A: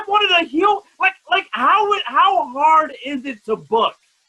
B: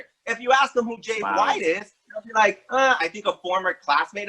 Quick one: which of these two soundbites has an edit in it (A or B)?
B